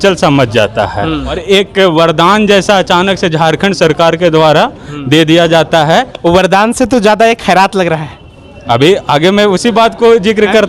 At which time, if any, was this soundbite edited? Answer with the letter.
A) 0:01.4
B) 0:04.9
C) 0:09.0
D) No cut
A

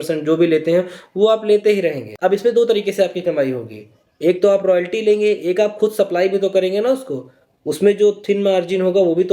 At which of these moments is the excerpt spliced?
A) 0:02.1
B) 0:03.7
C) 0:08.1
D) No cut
A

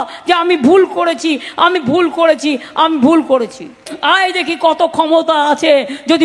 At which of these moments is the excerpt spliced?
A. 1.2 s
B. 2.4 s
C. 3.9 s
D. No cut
C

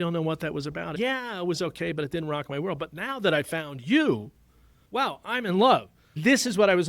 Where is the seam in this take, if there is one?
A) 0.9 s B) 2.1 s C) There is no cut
A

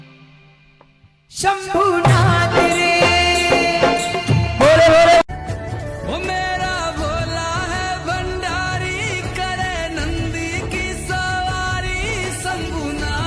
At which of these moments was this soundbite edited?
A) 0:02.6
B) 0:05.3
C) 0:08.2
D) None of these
B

